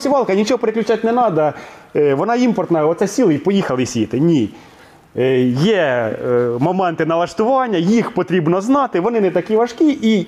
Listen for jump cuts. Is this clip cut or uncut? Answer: uncut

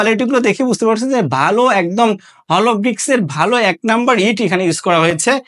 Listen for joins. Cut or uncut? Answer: uncut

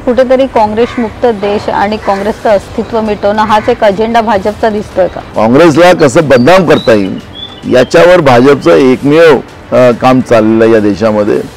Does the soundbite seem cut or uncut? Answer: cut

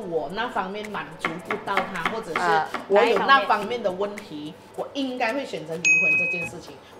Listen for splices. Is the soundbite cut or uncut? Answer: uncut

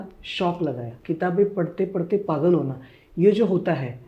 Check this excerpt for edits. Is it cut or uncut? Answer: cut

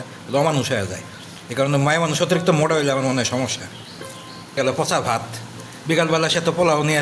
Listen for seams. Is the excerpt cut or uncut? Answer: cut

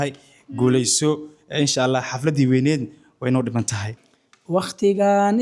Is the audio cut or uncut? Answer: cut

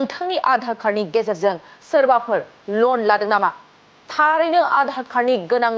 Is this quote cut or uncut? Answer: uncut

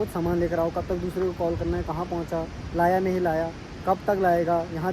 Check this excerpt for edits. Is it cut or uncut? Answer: uncut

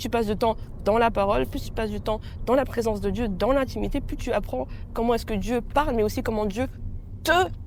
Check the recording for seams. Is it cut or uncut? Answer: uncut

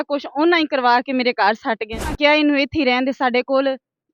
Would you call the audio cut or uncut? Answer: cut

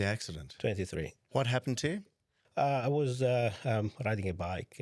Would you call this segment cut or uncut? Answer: cut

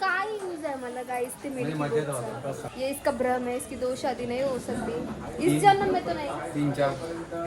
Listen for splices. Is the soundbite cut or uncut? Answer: cut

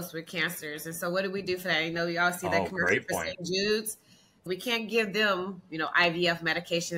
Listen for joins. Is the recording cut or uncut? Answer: cut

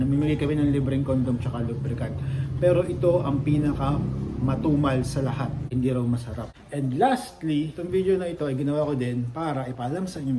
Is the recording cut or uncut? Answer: cut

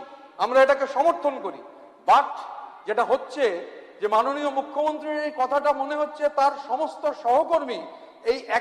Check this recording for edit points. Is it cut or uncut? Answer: uncut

